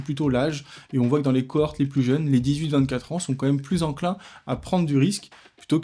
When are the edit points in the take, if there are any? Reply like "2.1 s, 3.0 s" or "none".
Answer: none